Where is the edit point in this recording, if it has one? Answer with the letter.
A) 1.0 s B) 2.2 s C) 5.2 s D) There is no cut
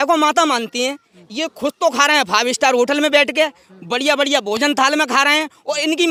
D